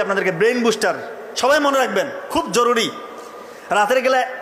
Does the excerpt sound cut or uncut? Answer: uncut